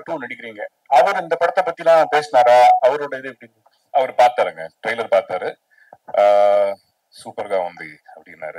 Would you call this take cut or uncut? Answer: uncut